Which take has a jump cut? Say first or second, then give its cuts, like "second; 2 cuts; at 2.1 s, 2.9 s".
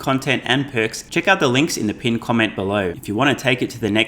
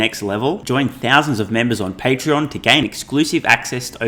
first; 2 cuts; at 1.0 s, 3.0 s